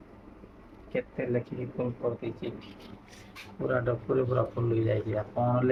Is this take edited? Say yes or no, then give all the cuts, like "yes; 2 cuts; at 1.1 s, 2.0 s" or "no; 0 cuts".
no; 0 cuts